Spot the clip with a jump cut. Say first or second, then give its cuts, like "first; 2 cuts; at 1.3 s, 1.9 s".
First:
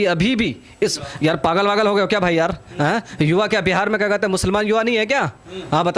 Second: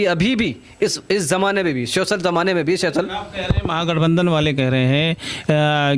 first; 1 cut; at 1.0 s